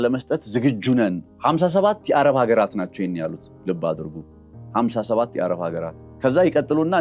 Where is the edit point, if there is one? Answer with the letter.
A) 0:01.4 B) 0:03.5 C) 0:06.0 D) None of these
C